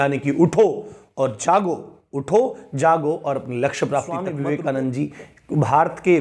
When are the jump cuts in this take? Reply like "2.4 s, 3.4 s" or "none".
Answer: 4.2 s